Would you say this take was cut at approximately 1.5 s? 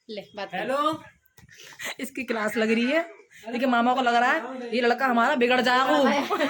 no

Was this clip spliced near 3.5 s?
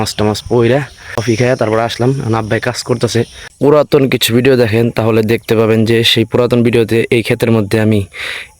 yes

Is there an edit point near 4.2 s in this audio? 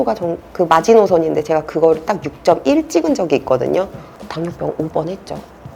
no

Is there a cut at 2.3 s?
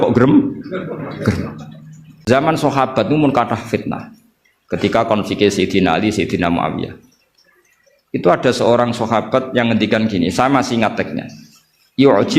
yes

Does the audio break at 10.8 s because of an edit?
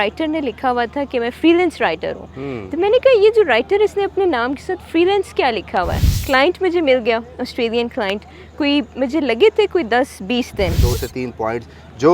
yes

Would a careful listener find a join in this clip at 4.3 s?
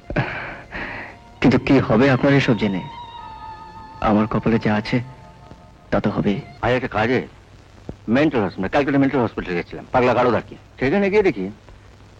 no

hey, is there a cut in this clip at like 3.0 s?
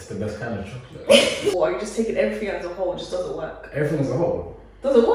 no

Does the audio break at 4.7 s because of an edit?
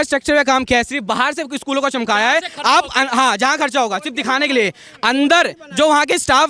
no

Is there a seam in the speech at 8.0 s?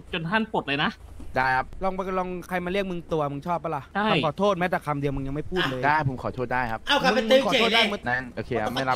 yes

